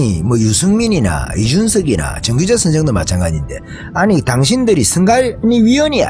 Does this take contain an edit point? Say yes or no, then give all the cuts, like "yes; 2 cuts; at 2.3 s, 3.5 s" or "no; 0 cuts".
no; 0 cuts